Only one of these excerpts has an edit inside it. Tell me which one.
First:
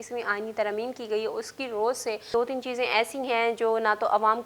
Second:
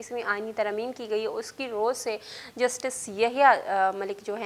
first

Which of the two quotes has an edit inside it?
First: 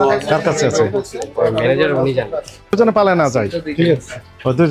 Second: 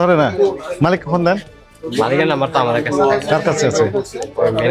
first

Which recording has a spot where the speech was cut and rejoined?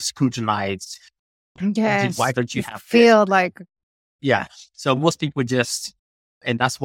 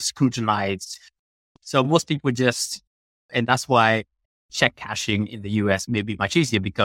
second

